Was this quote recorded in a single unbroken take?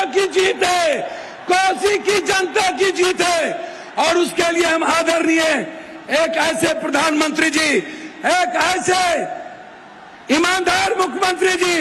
yes; 0 cuts

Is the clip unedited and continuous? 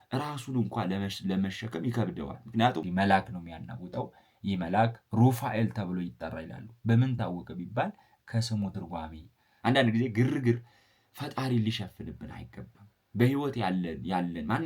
no; 2 cuts; at 2.9 s, 9.4 s

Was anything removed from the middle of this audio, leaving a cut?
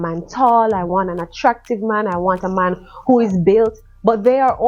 no; 0 cuts

